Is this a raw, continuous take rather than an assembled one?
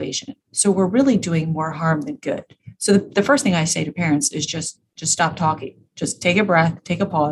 yes; 0 cuts

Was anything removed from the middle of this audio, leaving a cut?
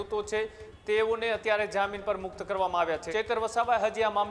yes; 1 cut; at 3.0 s

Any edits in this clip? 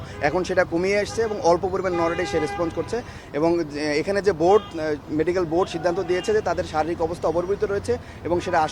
yes; 1 cut; at 3.2 s

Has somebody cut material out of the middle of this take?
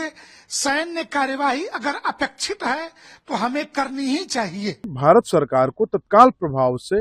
yes; 1 cut; at 4.9 s

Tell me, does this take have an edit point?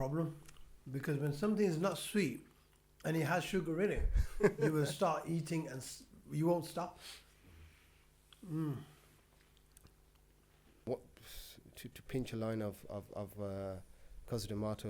yes; 1 cut; at 10.9 s

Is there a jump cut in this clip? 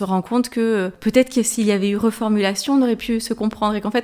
yes; 1 cut; at 1.0 s

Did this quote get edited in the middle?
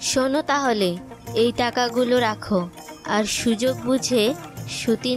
no; 0 cuts

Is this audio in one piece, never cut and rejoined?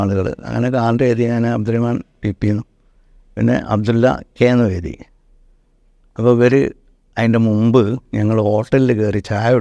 yes; 0 cuts

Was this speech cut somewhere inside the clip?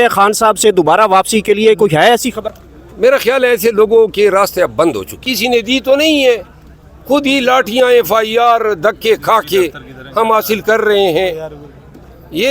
yes; 1 cut; at 5.3 s

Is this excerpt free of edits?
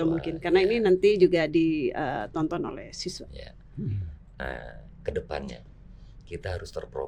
no; 1 cut; at 4.2 s

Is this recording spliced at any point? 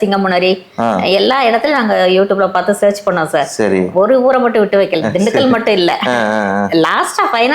no; 0 cuts

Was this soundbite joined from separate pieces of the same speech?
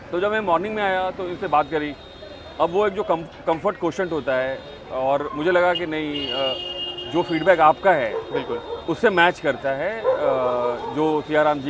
no; 0 cuts

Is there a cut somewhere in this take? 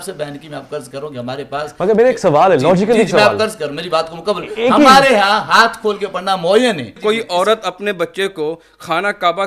yes; 1 cut; at 6.9 s

